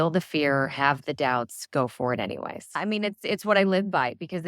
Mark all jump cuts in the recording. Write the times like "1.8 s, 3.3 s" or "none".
2.8 s

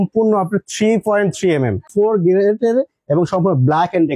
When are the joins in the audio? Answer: 1.9 s

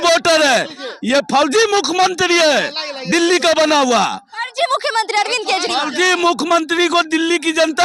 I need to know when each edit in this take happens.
none

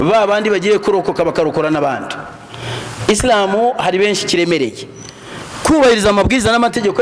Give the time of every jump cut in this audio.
none

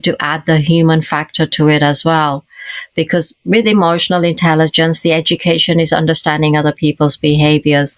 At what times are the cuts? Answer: none

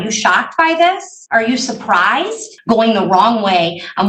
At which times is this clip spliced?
1.1 s, 2.5 s

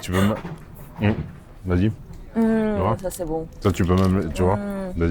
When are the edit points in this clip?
2.1 s

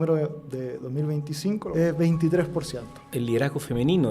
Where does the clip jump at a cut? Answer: 1.6 s, 3.1 s

